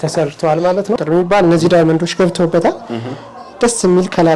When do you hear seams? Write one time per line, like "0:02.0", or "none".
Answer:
0:01.0